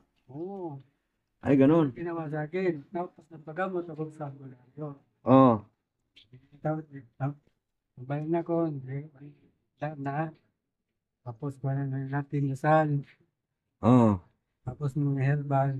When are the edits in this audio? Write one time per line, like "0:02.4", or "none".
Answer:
none